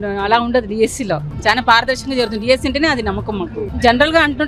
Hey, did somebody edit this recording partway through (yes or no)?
no